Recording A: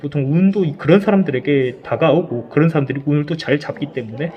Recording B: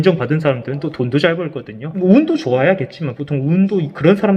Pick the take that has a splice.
B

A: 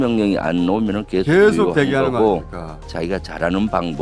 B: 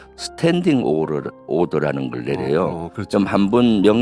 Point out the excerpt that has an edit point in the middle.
A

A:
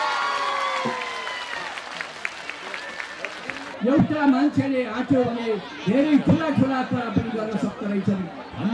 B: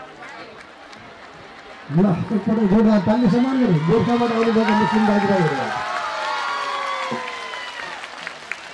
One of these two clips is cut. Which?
A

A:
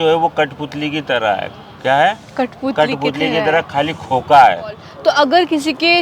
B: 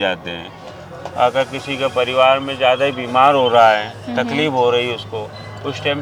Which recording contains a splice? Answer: A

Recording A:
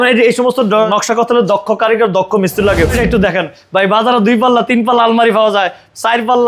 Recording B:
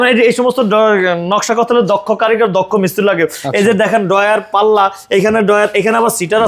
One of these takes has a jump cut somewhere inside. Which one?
A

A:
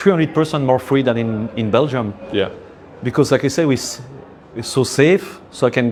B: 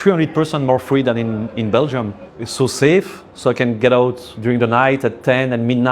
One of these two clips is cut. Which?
B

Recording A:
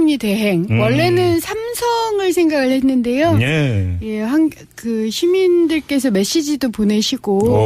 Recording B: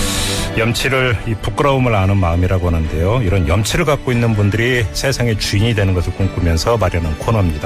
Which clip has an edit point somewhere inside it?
A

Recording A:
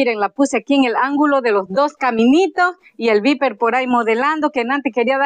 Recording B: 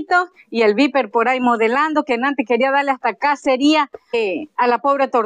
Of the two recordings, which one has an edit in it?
B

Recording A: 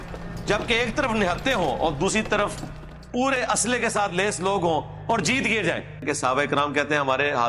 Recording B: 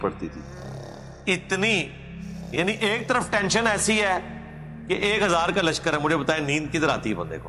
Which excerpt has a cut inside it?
A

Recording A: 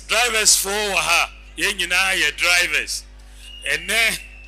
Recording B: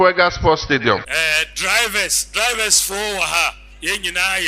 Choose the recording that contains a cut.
B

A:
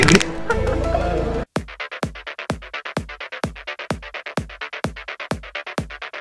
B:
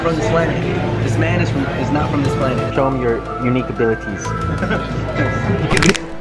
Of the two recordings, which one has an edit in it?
A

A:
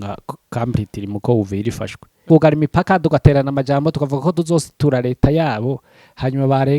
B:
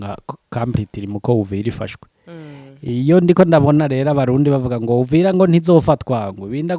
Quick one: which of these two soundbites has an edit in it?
A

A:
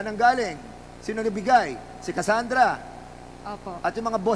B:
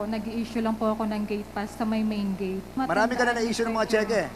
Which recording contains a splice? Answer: B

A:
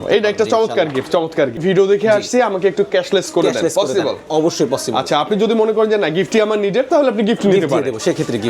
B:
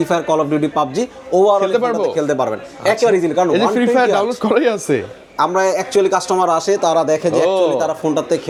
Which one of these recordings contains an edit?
A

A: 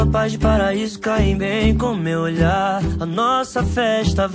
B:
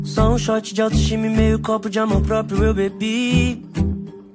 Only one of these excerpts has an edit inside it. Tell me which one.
B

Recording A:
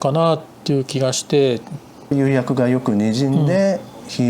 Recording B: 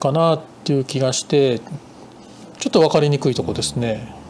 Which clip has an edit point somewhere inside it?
A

